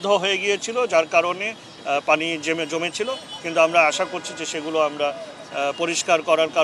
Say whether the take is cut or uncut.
uncut